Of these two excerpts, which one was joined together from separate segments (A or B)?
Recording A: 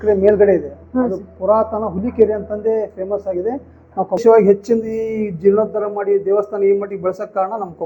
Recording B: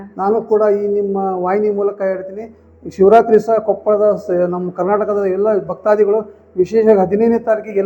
A